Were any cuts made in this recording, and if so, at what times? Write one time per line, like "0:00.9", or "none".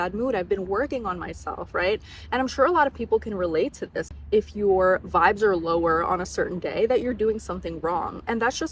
0:04.1